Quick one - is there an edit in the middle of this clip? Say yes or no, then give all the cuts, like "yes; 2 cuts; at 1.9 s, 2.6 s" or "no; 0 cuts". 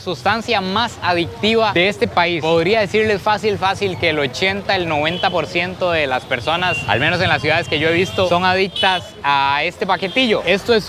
no; 0 cuts